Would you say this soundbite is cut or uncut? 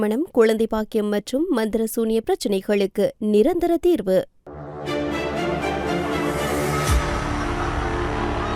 cut